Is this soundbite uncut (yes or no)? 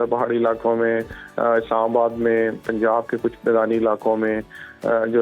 yes